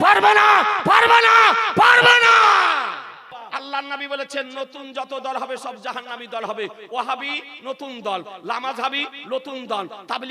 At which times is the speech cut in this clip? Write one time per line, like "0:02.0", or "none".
0:03.4